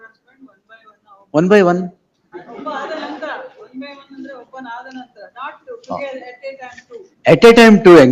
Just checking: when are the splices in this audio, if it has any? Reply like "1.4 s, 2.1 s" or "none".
none